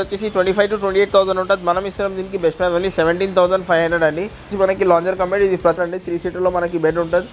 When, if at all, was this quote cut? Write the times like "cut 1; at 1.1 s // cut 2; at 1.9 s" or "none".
cut 1; at 4.5 s // cut 2; at 5.8 s